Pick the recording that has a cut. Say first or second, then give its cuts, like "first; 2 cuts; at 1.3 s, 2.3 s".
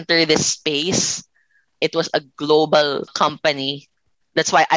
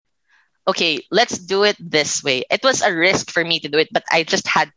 first; 2 cuts; at 1.7 s, 3.1 s